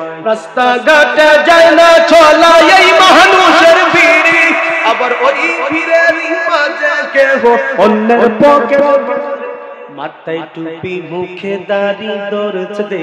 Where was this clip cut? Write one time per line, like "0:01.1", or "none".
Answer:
0:09.7